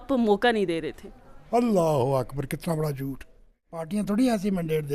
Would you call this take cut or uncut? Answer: cut